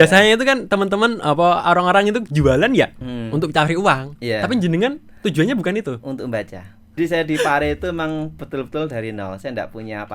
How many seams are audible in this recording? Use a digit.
1